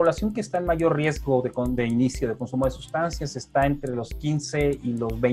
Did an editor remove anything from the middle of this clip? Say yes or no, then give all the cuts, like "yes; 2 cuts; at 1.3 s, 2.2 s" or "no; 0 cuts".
no; 0 cuts